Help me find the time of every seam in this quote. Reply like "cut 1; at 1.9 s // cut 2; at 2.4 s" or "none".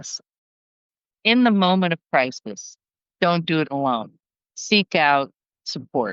cut 1; at 0.9 s // cut 2; at 4.6 s